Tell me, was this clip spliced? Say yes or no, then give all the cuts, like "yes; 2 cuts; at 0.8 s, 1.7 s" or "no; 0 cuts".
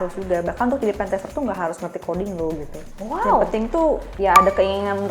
yes; 2 cuts; at 2.8 s, 4.1 s